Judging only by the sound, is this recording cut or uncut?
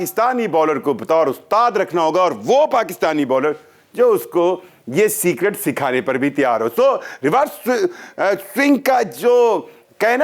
uncut